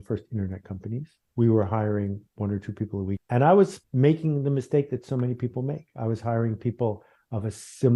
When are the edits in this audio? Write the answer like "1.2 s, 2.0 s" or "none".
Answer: 1.2 s, 3.2 s, 3.8 s

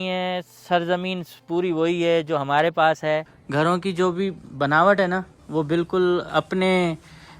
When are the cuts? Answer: 3.3 s

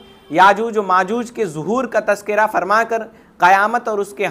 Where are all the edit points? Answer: none

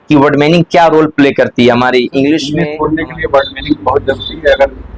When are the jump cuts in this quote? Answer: 2.5 s

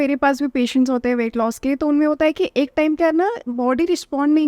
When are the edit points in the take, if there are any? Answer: none

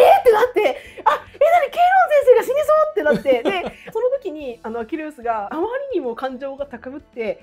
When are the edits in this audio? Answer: 3.7 s, 5.5 s

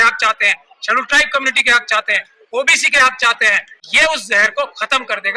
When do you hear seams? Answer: 3.7 s

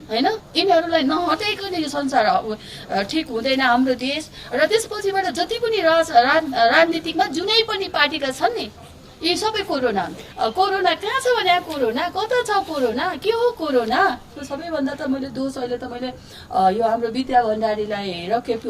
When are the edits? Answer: 10.2 s, 14.5 s

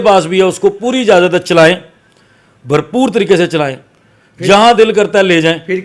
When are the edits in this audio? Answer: none

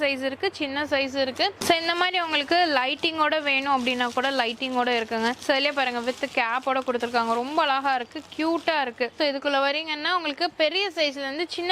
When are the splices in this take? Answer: 1.6 s, 9.1 s

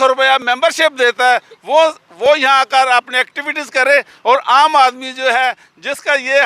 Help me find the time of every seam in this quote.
none

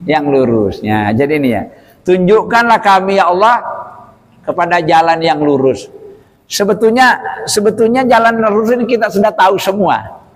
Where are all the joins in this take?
none

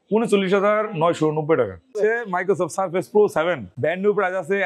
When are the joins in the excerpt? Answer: 1.9 s, 3.7 s

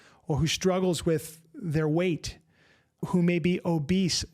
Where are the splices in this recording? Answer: 3.1 s

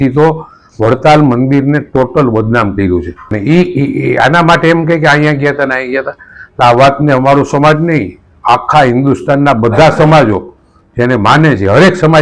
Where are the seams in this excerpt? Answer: 3.2 s

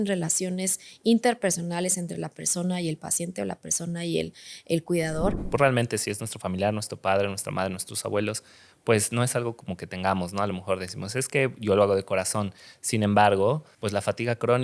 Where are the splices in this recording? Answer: 5.4 s, 13.7 s

